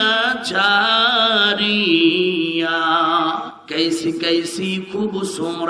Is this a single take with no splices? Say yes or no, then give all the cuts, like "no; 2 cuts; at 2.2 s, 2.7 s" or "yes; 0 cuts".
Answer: no; 1 cut; at 3.6 s